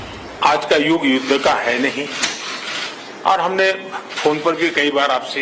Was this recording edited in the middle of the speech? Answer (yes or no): yes